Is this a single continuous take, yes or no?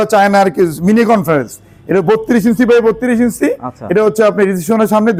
yes